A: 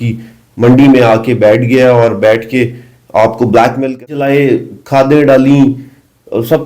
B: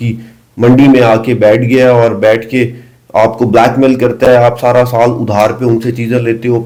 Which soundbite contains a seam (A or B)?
A